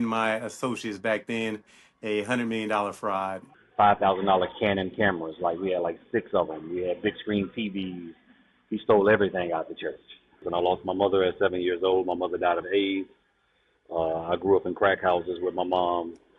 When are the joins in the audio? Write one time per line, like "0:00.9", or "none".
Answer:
0:03.6
0:10.4